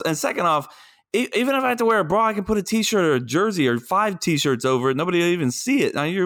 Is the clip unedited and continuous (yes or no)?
yes